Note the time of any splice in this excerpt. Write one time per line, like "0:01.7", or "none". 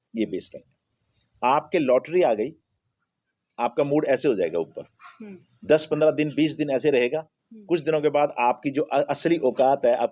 none